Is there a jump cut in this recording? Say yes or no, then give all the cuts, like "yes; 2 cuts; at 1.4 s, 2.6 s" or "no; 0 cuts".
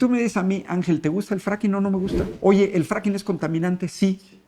yes; 1 cut; at 2.2 s